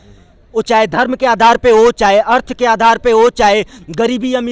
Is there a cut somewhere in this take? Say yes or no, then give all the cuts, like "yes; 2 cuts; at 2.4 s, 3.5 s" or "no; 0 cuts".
no; 0 cuts